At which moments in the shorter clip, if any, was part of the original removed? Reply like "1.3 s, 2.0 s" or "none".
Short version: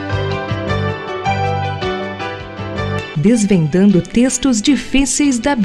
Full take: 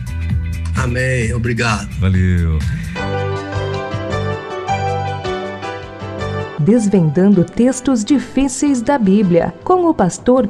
none